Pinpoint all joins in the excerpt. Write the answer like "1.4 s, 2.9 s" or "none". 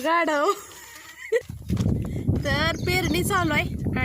1.5 s

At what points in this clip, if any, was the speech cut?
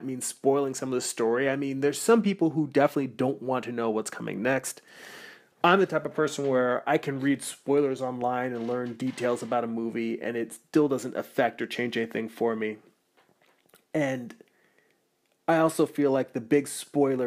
11.6 s

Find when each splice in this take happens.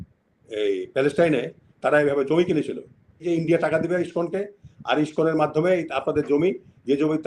3.2 s

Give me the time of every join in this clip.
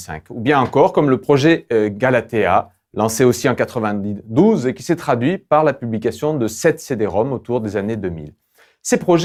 none

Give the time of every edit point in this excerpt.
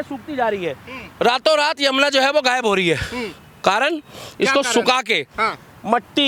none

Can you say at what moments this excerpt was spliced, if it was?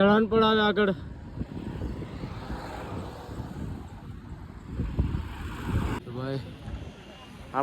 6.0 s

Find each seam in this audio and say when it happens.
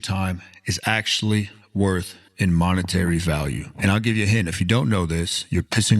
2.2 s

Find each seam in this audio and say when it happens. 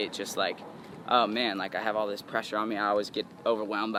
none

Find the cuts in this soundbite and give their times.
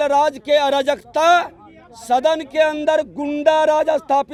none

